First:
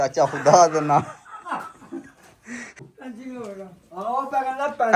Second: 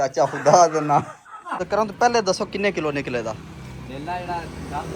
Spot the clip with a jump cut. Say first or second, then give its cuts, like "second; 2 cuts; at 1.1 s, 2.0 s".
second; 1 cut; at 1.6 s